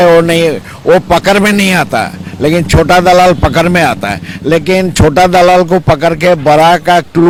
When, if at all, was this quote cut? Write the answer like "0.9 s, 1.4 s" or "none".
none